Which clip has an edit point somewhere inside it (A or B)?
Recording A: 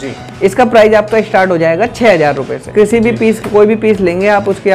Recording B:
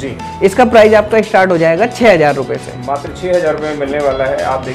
A